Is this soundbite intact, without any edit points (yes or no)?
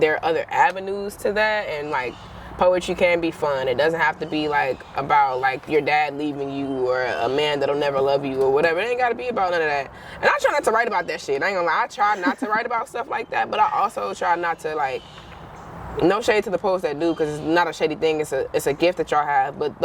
yes